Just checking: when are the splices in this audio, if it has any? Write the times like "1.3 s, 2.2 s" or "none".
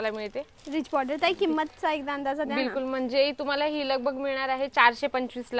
none